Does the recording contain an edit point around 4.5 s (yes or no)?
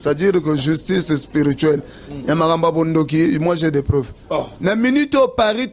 yes